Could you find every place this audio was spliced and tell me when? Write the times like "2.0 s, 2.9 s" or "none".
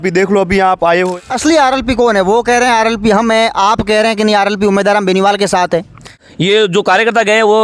1.1 s, 6.2 s